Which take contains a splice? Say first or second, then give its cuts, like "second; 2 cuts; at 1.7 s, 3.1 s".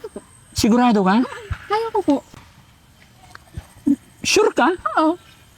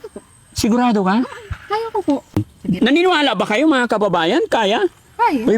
second; 1 cut; at 2.5 s